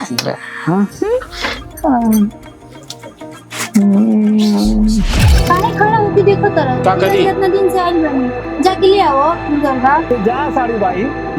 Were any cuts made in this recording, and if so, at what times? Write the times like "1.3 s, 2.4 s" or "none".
5.2 s